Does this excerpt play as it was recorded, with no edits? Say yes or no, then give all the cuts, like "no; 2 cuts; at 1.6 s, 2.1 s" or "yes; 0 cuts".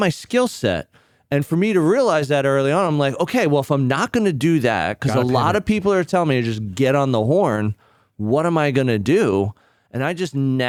yes; 0 cuts